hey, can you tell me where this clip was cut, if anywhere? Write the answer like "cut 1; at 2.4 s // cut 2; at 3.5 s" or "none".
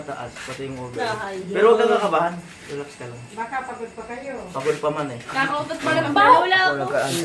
none